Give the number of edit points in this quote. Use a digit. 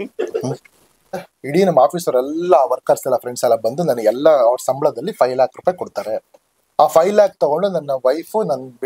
1